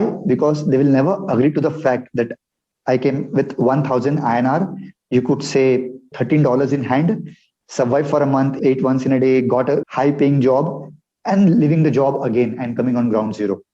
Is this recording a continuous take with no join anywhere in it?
no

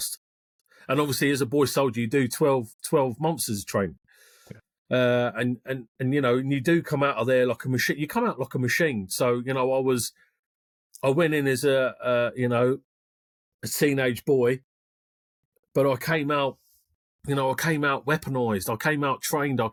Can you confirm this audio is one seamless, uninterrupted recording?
yes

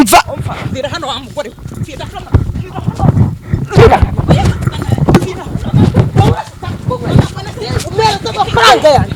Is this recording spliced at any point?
no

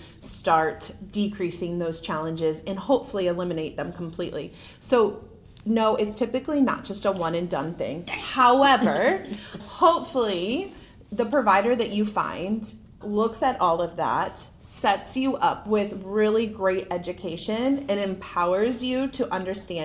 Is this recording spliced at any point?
no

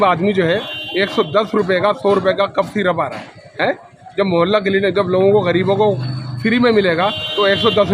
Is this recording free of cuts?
yes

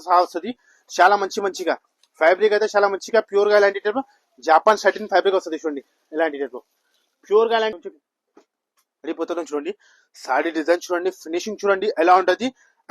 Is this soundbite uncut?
no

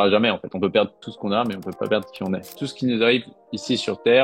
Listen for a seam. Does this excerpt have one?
yes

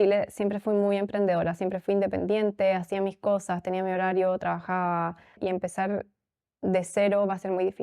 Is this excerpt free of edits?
no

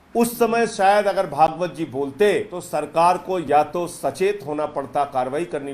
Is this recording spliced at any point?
yes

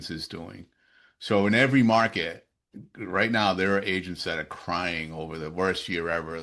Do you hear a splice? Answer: no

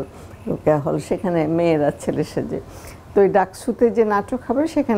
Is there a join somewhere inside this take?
no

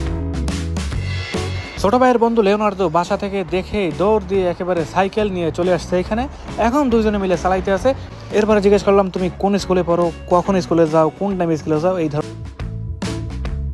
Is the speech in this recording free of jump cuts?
no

